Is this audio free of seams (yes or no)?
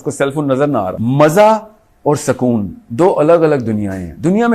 no